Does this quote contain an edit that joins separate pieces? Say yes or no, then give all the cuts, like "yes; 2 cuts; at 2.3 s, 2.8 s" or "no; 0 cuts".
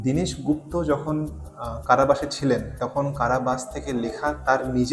no; 0 cuts